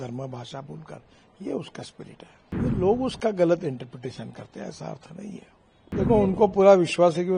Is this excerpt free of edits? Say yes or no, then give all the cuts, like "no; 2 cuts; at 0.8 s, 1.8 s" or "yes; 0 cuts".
no; 2 cuts; at 2.4 s, 5.9 s